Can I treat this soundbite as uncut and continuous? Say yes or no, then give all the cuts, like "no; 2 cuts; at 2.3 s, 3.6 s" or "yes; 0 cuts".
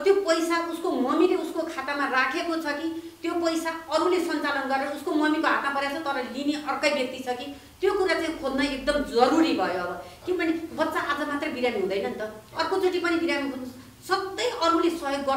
yes; 0 cuts